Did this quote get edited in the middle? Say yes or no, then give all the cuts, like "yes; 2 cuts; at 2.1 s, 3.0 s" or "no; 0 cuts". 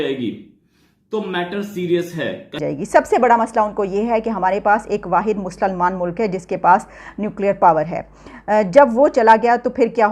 yes; 1 cut; at 2.6 s